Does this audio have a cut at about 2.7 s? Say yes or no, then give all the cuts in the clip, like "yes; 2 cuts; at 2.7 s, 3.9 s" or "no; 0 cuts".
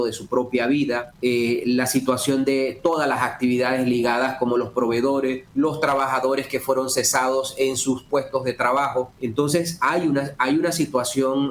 no; 3 cuts; at 1.1 s, 5.4 s, 9.2 s